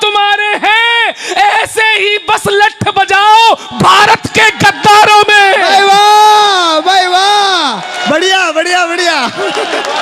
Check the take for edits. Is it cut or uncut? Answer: uncut